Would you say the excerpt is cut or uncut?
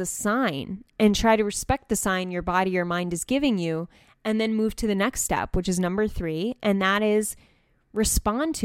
uncut